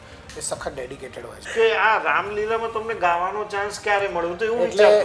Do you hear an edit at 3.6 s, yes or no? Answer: no